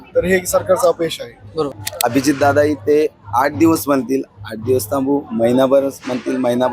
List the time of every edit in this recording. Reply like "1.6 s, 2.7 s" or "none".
1.8 s